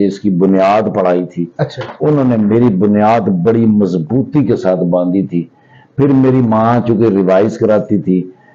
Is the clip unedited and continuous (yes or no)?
yes